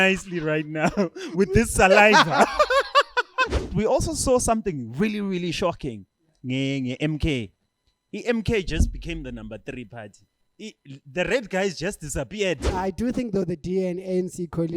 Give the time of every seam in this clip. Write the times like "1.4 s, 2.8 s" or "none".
3.7 s, 12.7 s